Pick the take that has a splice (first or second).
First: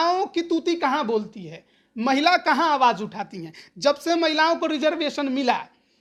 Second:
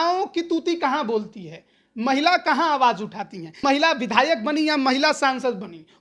second